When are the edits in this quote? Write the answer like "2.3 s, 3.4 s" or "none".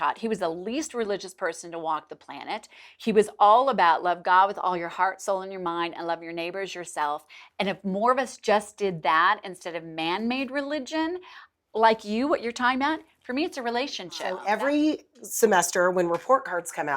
14.4 s

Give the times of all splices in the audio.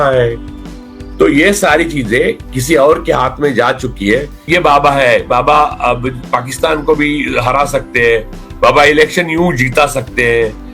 4.4 s

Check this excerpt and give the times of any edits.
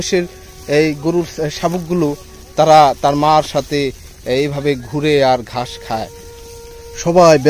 6.2 s

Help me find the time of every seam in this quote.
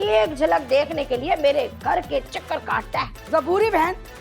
none

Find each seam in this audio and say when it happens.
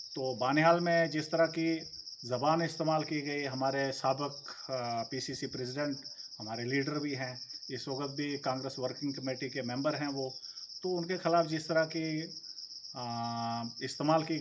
none

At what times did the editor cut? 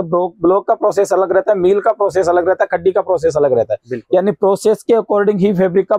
none

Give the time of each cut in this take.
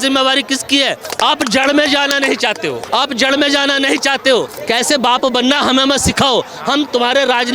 1.0 s, 2.8 s, 4.6 s

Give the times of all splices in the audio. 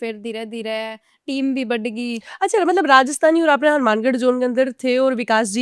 none

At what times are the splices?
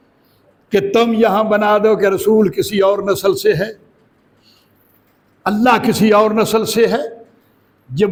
none

